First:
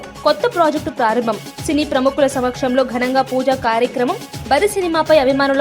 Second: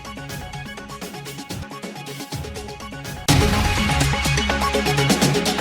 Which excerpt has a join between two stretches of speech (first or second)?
second